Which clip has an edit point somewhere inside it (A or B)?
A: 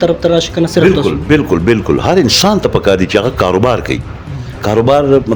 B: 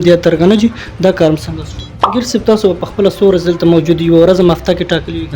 B